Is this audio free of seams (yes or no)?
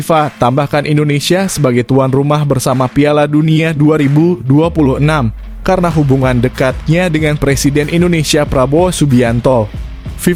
yes